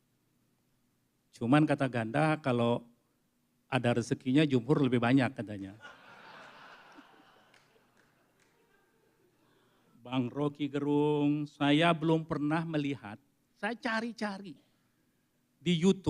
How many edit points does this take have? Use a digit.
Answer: 1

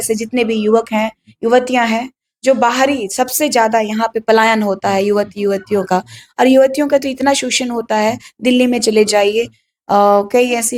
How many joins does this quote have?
0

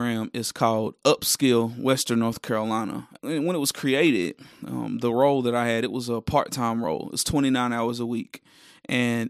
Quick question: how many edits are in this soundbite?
1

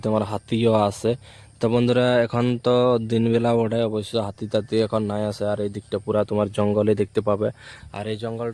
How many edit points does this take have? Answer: 0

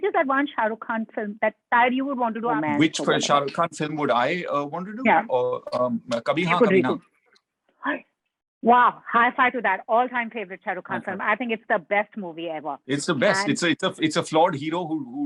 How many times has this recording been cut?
1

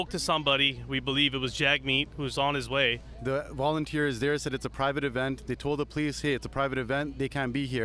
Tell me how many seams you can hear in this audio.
1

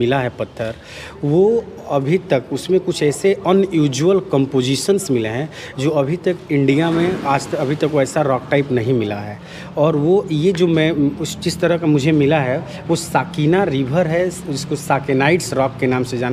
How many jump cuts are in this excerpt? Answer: 0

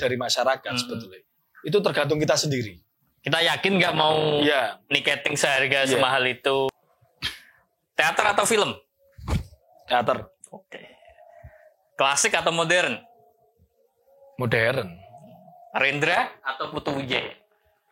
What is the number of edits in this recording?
1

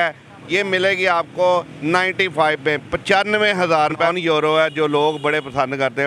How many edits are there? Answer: 1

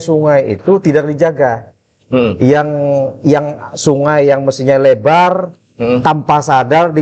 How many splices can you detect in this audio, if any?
0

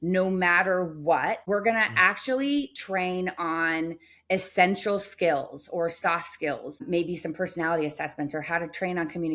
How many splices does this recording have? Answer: 2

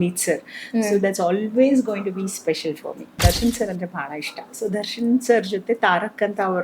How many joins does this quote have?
1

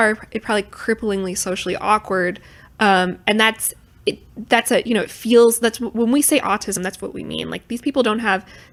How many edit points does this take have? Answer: 0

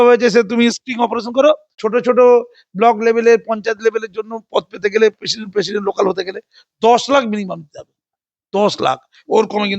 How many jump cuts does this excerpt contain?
1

